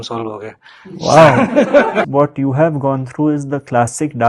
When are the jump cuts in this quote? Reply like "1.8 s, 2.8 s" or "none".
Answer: 2.1 s

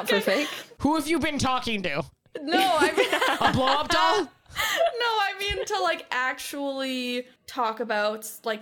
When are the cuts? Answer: 0.8 s, 7.4 s

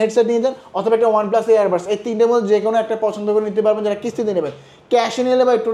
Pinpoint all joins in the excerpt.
none

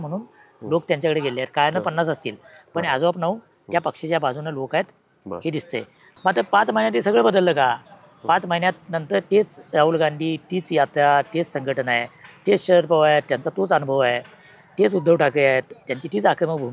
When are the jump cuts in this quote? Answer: 6.0 s

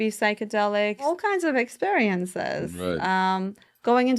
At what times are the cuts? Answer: 1.1 s

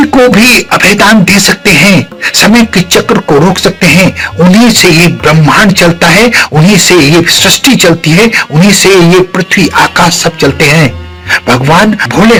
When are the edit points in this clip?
none

